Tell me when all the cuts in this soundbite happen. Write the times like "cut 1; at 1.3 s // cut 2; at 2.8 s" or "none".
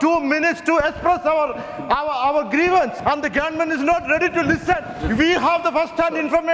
cut 1; at 2.9 s // cut 2; at 4.9 s